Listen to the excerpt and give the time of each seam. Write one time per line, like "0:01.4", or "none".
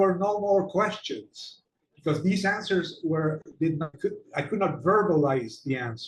0:03.9